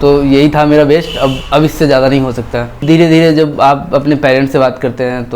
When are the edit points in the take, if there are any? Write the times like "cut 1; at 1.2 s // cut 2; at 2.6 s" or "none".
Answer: cut 1; at 2.8 s

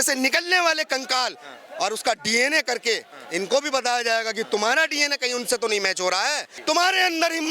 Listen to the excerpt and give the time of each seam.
cut 1; at 6.5 s

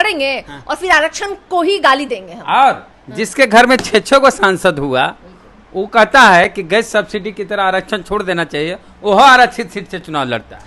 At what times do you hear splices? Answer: none

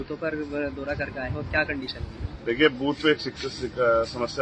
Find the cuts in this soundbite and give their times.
none

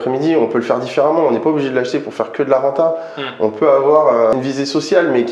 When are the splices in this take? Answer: cut 1; at 4.3 s

